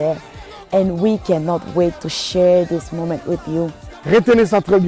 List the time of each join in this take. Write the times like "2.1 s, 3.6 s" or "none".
none